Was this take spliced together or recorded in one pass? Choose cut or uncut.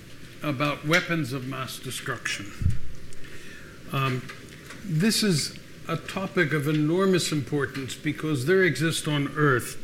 uncut